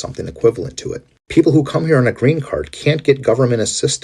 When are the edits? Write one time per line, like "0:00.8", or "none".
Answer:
none